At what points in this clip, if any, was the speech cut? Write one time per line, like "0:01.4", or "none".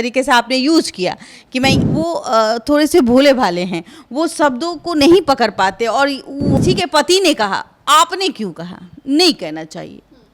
0:01.8
0:06.6